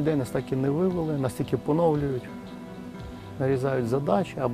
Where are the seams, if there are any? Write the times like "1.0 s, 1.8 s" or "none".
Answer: none